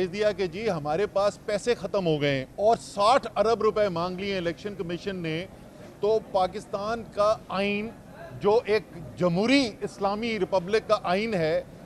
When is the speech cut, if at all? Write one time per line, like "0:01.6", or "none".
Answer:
0:02.5